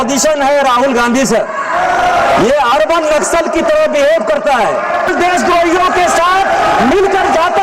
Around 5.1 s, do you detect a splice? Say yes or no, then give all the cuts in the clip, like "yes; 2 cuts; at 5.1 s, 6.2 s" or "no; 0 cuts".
yes; 1 cut; at 5.1 s